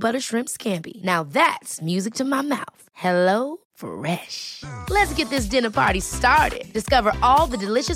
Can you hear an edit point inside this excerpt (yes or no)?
no